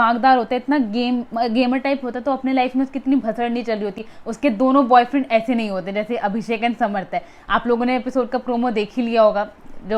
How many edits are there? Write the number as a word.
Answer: zero